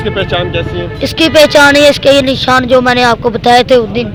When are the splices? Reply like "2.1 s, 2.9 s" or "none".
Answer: none